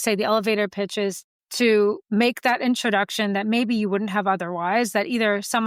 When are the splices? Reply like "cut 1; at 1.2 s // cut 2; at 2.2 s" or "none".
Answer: none

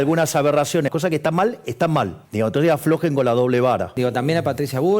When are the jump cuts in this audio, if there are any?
cut 1; at 0.9 s // cut 2; at 2.2 s // cut 3; at 3.9 s

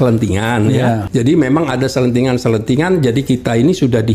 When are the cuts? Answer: cut 1; at 1.0 s

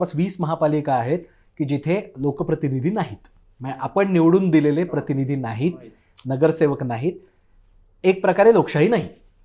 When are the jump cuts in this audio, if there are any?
none

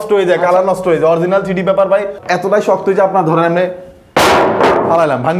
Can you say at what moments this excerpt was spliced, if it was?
cut 1; at 2.2 s

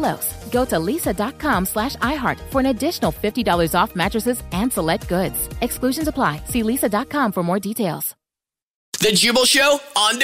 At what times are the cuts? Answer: cut 1; at 9.0 s

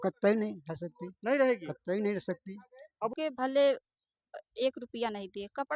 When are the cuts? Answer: cut 1; at 3.1 s

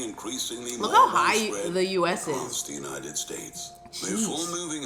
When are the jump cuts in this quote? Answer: none

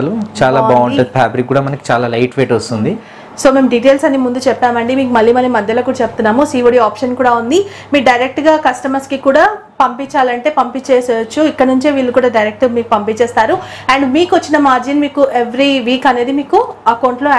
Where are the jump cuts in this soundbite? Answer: none

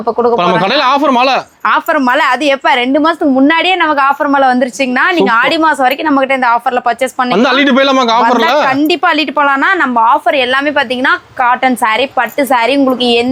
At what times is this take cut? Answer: none

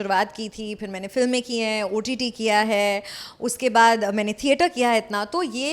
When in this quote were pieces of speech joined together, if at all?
none

